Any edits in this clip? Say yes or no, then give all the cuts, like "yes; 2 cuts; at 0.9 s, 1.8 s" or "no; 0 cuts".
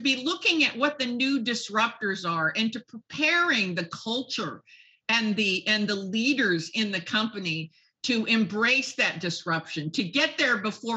no; 0 cuts